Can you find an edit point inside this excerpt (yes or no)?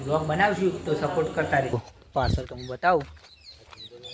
yes